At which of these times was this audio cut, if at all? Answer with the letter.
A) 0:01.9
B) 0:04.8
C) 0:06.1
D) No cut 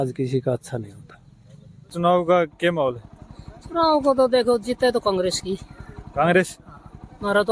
A